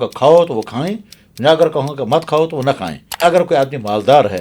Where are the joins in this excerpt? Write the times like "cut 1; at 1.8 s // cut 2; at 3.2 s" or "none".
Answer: cut 1; at 3.2 s